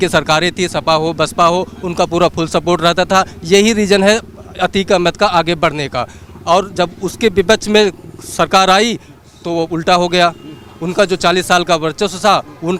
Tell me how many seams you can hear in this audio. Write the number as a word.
zero